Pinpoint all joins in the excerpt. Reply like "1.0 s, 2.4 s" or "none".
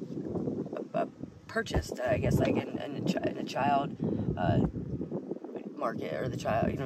none